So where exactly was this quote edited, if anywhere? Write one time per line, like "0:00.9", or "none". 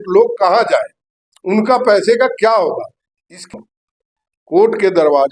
0:03.5